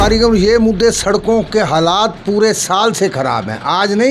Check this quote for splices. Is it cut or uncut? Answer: uncut